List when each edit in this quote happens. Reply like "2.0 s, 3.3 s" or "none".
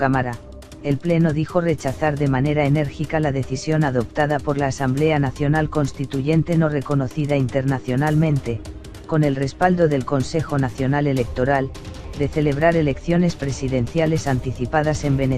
1.9 s